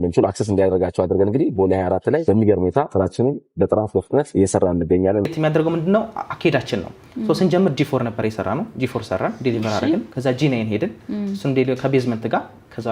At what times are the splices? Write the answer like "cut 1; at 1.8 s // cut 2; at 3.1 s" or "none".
cut 1; at 2.2 s // cut 2; at 2.9 s // cut 3; at 4.3 s // cut 4; at 5.3 s